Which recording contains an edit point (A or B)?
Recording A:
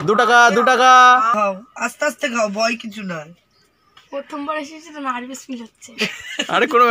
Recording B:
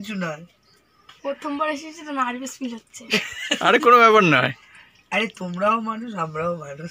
A